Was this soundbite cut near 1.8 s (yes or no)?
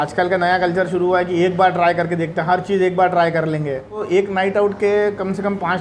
no